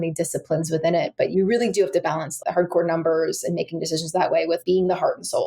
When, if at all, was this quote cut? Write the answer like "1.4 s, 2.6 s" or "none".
1.3 s, 2.4 s, 4.6 s